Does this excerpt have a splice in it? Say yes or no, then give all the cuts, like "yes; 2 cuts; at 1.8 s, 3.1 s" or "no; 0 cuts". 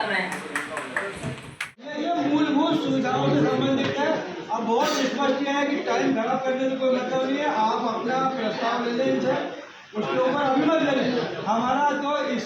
yes; 1 cut; at 1.9 s